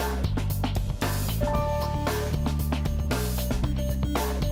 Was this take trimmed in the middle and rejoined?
no; 0 cuts

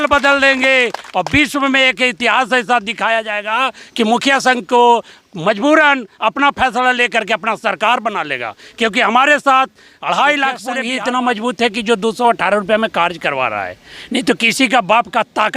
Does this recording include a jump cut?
yes; 1 cut; at 10.9 s

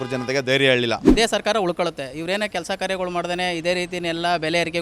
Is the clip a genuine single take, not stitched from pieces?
no; 1 cut; at 1.1 s

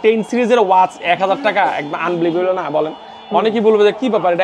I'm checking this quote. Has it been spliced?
no; 0 cuts

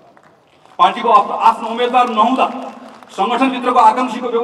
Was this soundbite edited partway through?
no; 0 cuts

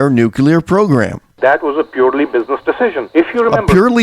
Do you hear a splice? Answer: yes; 2 cuts; at 1.2 s, 3.0 s

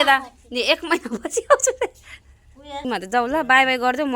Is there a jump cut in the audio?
yes; 1 cut; at 2.8 s

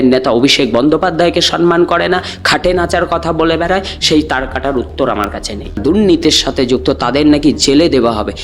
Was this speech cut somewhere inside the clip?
yes; 1 cut; at 5.8 s

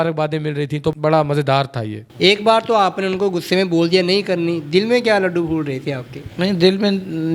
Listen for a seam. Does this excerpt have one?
yes; 2 cuts; at 0.9 s, 2.0 s

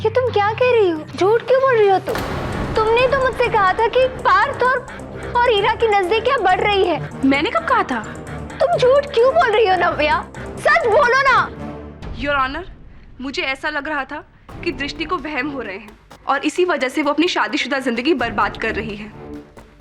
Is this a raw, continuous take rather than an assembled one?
no; 3 cuts; at 1.1 s, 4.2 s, 7.0 s

